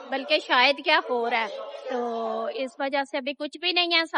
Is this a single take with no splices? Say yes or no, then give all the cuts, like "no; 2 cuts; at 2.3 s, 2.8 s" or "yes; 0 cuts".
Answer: yes; 0 cuts